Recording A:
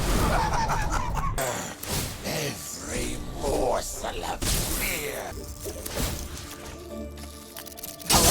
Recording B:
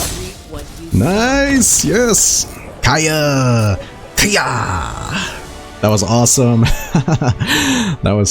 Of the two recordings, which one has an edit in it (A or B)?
A